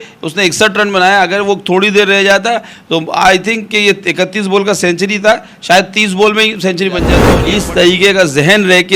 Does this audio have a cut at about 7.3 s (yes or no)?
yes